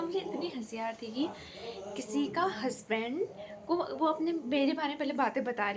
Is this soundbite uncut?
yes; 0 cuts

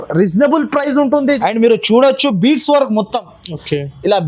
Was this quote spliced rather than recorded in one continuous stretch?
yes; 1 cut; at 1.3 s

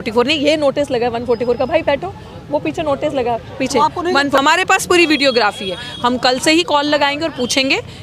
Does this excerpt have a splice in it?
yes; 1 cut; at 4.4 s

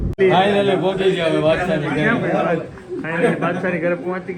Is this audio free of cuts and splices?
yes; 0 cuts

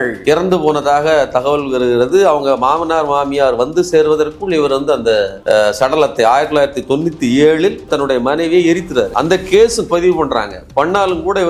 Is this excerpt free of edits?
yes; 0 cuts

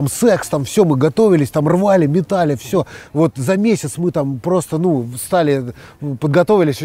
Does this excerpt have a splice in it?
no; 0 cuts

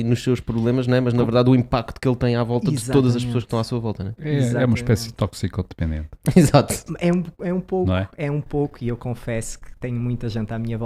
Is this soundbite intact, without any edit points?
yes; 0 cuts

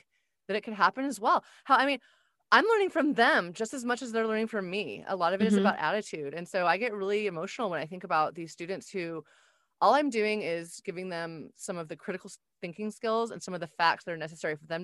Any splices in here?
no; 0 cuts

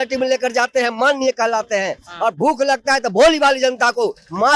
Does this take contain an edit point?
no; 0 cuts

